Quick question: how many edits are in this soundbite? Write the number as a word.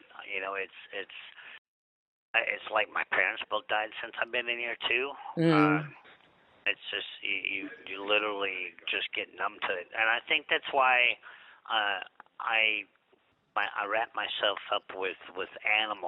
one